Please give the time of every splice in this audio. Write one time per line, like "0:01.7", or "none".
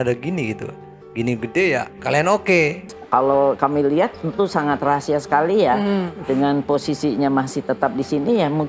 0:02.9